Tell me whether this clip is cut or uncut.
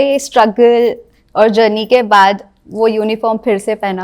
uncut